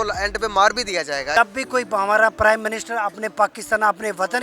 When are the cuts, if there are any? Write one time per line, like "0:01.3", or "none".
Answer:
0:01.4